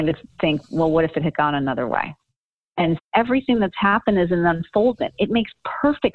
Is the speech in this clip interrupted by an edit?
yes; 1 cut; at 3.0 s

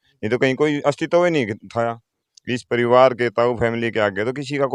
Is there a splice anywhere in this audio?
no; 0 cuts

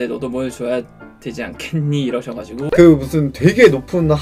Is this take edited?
yes; 1 cut; at 2.6 s

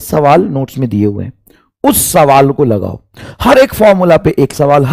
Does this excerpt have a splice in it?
no; 0 cuts

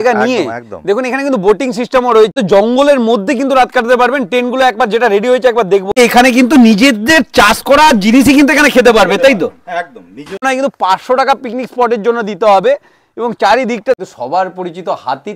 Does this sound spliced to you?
yes; 4 cuts; at 2.3 s, 5.9 s, 10.4 s, 14.0 s

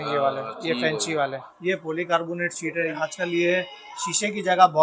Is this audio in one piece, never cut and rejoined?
no; 2 cuts; at 1.5 s, 2.9 s

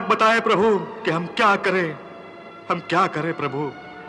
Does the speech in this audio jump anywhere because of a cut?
no; 0 cuts

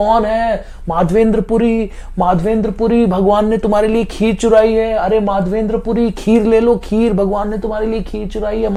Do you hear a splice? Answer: no; 0 cuts

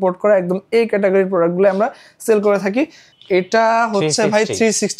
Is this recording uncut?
no; 1 cut; at 3.0 s

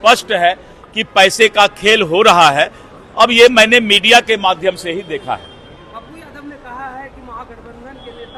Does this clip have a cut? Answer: no; 0 cuts

